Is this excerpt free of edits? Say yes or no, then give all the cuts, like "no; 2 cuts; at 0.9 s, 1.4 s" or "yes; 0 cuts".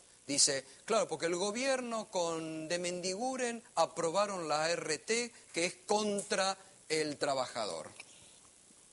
no; 1 cut; at 5.0 s